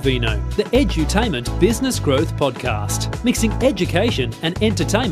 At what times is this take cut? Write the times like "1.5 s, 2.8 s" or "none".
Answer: none